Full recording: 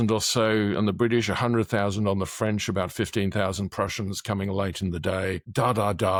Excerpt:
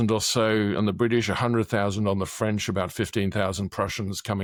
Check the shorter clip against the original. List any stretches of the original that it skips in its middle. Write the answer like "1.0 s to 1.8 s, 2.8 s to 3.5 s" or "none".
none